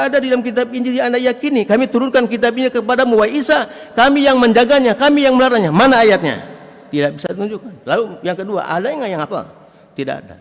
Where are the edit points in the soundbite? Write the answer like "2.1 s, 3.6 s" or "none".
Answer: none